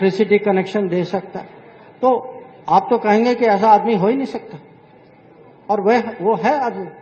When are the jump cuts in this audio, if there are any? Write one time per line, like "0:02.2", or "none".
none